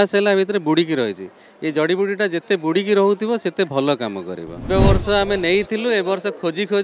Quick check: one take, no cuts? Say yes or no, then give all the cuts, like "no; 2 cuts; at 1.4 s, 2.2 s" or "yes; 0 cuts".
no; 1 cut; at 4.7 s